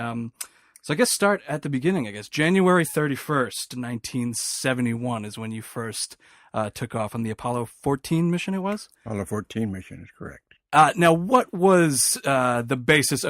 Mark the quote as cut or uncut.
cut